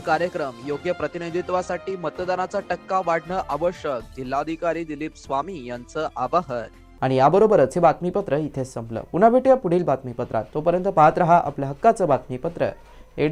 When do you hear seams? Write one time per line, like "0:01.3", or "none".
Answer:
none